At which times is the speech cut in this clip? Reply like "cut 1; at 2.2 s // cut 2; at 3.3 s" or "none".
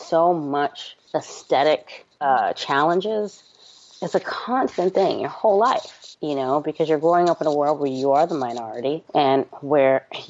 cut 1; at 2.2 s